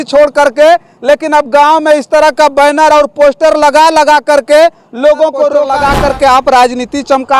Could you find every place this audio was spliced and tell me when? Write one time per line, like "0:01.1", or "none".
0:05.7

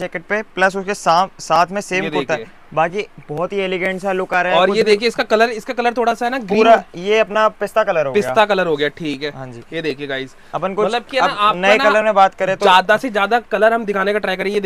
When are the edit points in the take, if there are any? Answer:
none

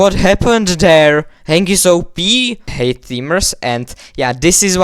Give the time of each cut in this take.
0:02.6

